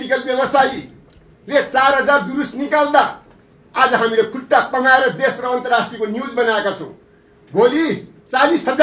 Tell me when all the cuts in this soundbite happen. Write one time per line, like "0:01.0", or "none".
none